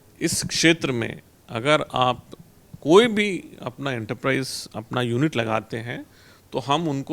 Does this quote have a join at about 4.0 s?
no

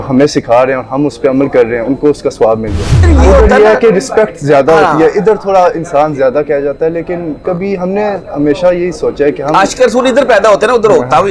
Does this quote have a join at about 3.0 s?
yes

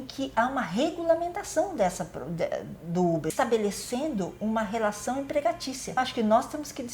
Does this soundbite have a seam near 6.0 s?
yes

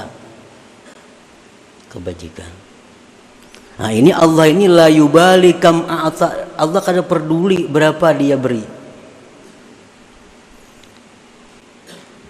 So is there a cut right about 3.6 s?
no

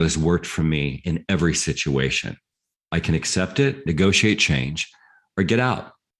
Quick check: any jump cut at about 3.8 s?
yes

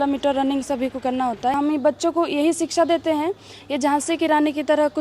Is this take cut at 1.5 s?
yes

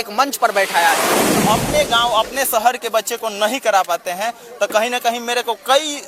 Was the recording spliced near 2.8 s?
no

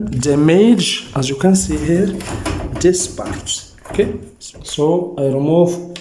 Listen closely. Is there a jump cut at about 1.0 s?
no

